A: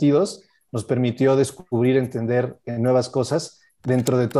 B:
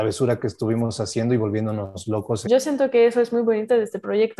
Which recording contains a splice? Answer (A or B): B